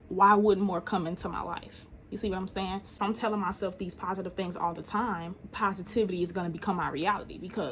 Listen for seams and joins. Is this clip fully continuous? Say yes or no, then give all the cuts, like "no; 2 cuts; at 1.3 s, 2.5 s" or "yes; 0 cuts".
no; 1 cut; at 2.9 s